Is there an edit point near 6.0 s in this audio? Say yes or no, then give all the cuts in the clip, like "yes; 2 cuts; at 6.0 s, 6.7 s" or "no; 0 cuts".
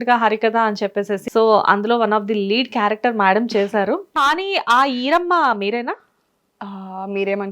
no; 2 cuts; at 1.2 s, 4.1 s